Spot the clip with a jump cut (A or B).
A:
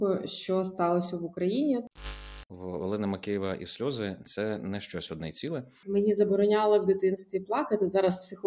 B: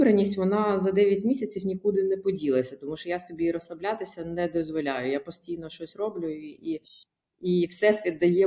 A